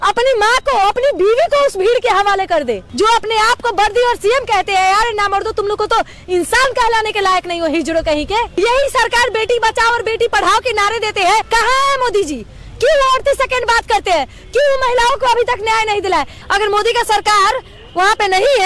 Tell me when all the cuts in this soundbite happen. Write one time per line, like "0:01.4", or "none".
0:02.9
0:08.5
0:11.5
0:16.4